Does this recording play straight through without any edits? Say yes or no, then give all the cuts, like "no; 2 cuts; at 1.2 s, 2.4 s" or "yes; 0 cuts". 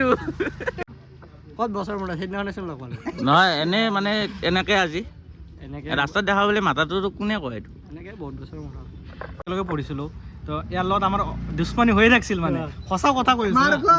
no; 2 cuts; at 0.8 s, 9.4 s